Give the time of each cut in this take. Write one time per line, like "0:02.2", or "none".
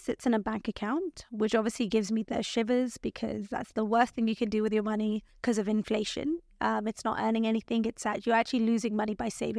0:05.3